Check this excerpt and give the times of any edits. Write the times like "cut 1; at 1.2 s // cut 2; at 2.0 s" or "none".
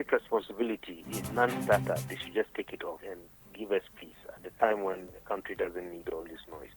cut 1; at 1.2 s // cut 2; at 3.0 s